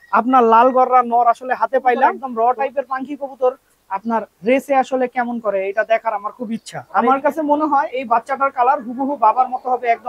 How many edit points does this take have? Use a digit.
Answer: 2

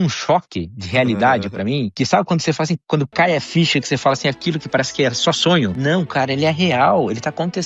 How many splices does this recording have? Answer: 2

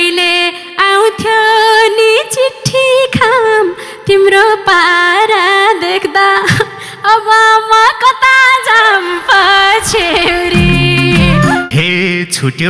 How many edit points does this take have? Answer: 1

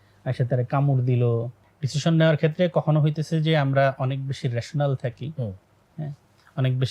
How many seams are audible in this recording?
1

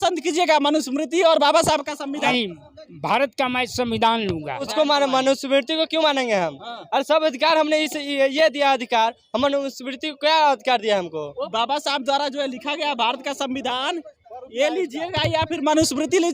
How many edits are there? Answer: 3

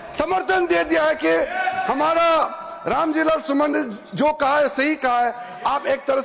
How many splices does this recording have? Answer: 0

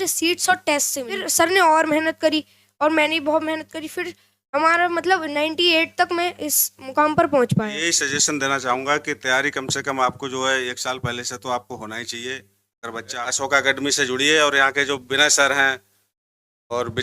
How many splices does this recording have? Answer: 3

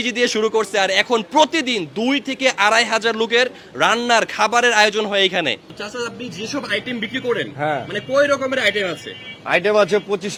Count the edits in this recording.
0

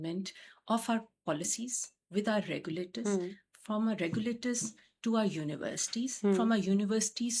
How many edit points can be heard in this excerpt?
0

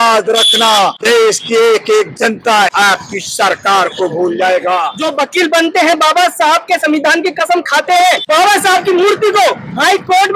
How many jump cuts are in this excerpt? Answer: 4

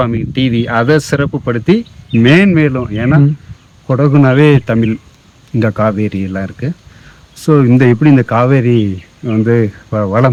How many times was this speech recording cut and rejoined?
0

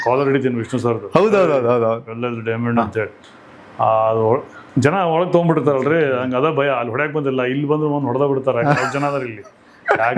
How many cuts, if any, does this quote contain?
0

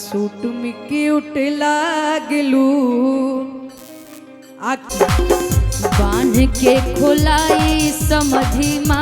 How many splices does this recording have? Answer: 1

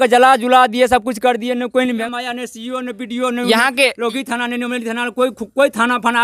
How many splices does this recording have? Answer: 1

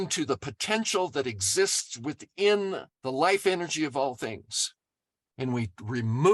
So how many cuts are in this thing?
1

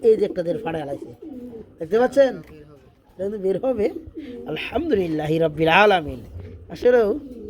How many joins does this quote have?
0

